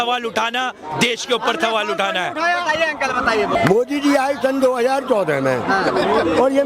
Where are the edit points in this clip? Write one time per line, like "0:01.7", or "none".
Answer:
0:03.5